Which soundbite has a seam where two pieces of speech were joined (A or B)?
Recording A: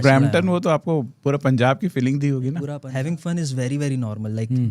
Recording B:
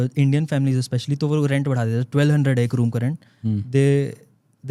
A